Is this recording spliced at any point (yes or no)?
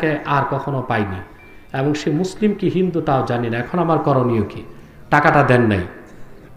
no